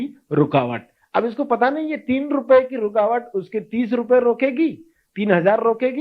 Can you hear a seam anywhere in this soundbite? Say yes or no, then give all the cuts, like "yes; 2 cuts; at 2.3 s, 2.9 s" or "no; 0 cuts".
no; 0 cuts